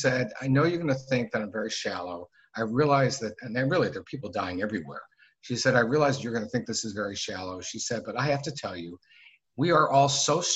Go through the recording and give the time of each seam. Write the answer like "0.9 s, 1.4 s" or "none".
none

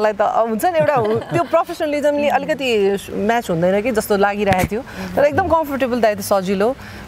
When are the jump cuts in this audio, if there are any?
none

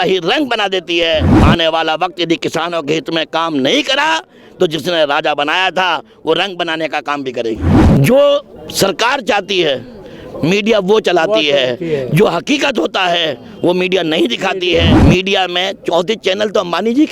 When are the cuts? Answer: 1.3 s, 7.7 s, 14.9 s

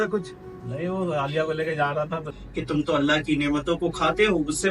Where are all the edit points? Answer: 2.3 s

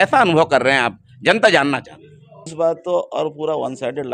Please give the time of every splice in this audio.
2.5 s

